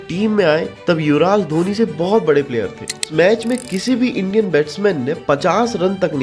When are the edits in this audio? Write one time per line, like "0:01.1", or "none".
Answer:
0:03.0

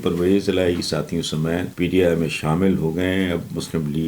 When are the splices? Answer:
0:01.7

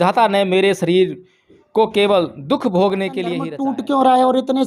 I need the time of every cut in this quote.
0:03.4

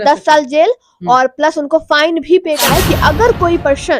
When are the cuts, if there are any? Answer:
0:02.6

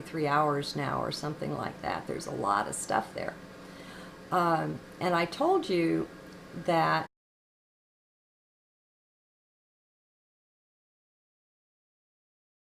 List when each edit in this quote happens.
none

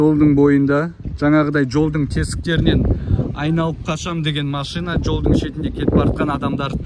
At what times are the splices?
none

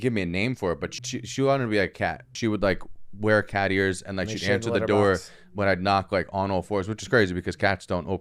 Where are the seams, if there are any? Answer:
0:00.9
0:02.3

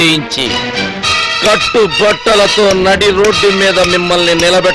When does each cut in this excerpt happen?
none

